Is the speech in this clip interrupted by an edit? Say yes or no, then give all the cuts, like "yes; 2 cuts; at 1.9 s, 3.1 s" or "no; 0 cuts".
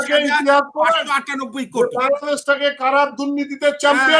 no; 0 cuts